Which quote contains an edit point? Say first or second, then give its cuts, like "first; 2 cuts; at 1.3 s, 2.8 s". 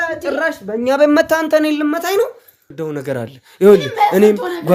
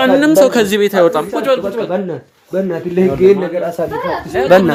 first; 1 cut; at 2.7 s